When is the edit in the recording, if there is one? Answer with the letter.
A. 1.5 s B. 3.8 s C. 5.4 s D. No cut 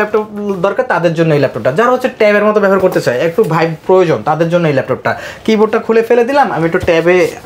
D